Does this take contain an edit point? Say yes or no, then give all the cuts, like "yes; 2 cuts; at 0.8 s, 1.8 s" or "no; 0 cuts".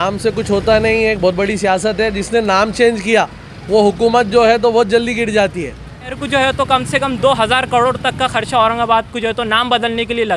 yes; 1 cut; at 6.2 s